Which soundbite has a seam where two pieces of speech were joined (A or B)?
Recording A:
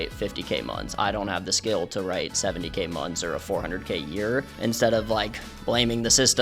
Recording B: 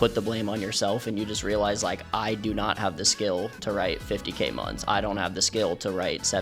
A